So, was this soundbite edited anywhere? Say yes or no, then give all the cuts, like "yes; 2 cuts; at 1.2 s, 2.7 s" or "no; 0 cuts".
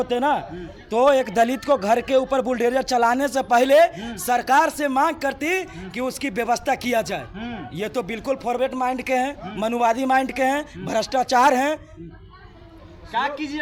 no; 0 cuts